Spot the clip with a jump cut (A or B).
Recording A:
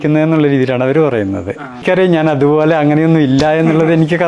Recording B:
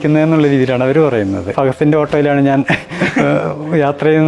B